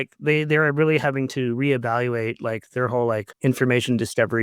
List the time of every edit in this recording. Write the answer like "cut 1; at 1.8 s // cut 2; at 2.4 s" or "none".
cut 1; at 3.3 s